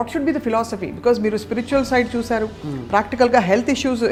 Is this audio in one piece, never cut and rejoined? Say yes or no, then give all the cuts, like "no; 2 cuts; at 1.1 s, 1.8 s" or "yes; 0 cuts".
yes; 0 cuts